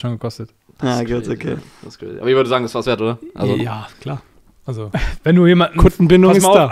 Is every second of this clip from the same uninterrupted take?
yes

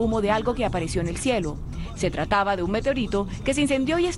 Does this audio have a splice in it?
yes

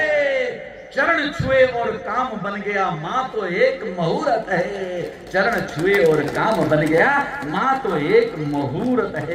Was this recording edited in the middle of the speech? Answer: no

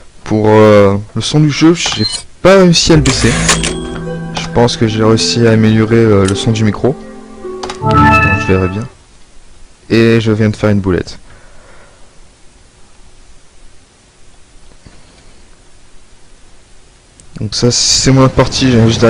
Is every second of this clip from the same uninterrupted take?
no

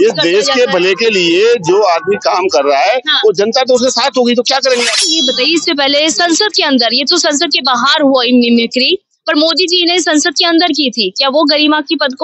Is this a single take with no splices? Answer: no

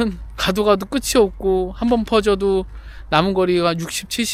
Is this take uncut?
yes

